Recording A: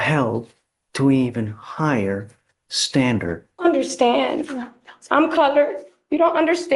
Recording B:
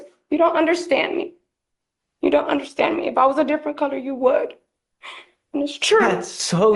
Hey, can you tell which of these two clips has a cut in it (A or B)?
A